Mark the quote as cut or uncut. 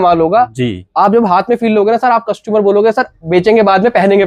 cut